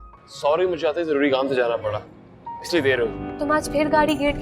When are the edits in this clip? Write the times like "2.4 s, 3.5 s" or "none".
3.2 s